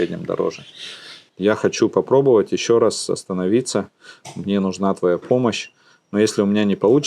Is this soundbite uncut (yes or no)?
no